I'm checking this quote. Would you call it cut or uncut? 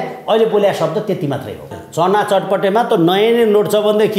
cut